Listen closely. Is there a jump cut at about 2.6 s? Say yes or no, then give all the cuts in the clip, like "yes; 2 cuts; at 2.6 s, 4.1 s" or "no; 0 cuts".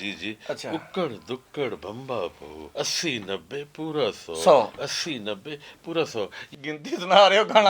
yes; 2 cuts; at 2.6 s, 6.5 s